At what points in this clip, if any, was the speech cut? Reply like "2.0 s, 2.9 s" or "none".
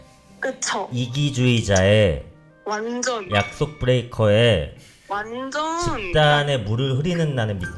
none